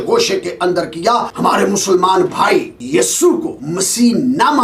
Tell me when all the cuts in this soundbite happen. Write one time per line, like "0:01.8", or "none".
0:01.3
0:02.8
0:03.6

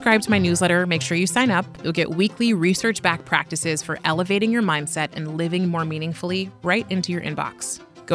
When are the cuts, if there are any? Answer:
0:01.8

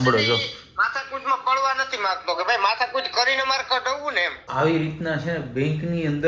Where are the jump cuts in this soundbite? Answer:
0:04.5

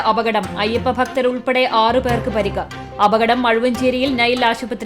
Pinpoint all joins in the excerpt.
none

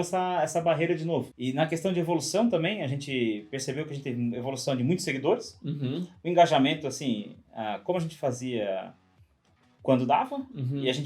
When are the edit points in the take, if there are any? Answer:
0:01.3

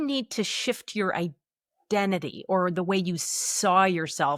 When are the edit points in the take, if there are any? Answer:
none

